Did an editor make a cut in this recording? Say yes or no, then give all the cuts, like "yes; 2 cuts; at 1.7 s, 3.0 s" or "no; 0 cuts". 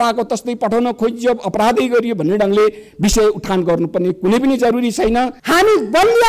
yes; 1 cut; at 5.4 s